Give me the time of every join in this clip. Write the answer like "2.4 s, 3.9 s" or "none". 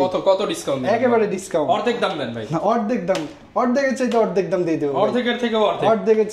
none